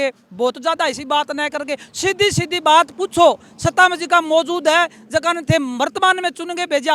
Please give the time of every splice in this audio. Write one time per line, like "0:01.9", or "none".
none